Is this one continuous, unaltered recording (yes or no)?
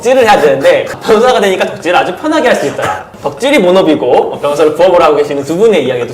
no